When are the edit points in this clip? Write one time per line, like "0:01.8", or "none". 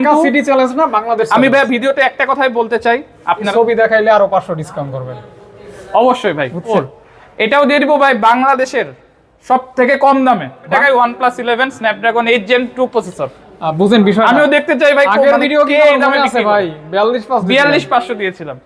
0:03.5
0:06.7
0:10.7